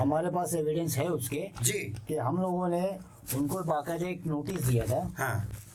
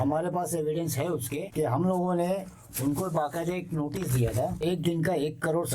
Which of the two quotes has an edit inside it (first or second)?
second